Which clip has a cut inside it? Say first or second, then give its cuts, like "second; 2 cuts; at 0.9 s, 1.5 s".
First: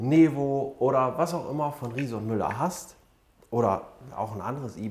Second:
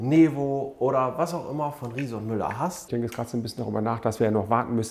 second; 1 cut; at 2.8 s